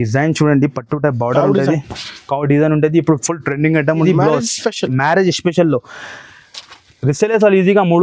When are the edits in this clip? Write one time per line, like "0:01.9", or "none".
0:04.0